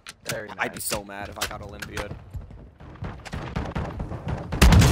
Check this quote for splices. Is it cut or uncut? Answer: cut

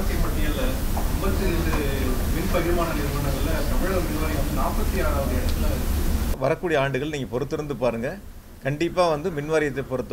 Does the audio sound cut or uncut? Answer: cut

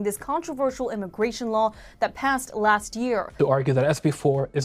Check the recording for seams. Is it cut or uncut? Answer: cut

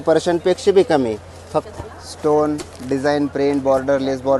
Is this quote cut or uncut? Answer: cut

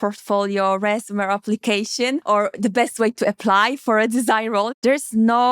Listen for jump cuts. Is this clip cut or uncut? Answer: cut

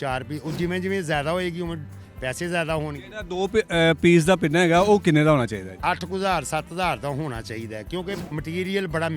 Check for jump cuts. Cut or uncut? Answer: cut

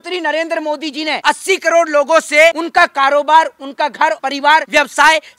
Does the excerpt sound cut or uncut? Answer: cut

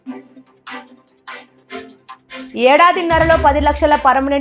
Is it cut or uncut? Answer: uncut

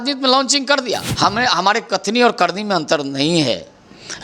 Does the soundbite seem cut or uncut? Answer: cut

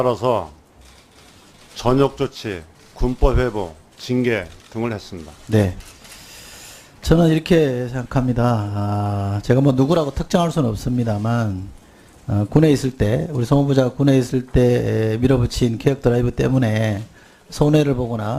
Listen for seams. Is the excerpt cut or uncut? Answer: cut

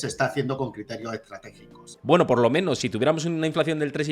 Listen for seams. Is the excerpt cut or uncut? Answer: cut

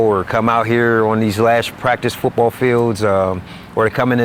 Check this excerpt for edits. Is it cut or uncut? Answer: uncut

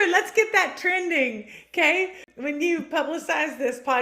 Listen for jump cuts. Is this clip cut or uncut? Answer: cut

